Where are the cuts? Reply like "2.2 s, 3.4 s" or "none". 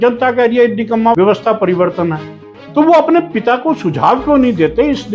1.2 s

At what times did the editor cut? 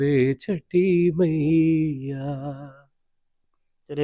none

